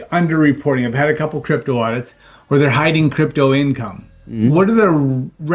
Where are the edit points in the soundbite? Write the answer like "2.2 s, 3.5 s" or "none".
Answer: none